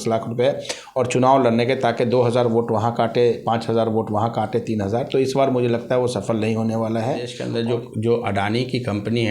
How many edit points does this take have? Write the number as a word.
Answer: one